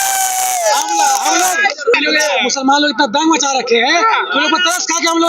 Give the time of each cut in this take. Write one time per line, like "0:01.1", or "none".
0:01.9